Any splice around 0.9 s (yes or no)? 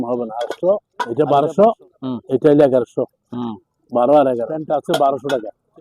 yes